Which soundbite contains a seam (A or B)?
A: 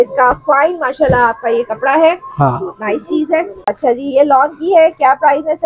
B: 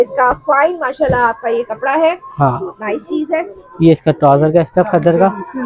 A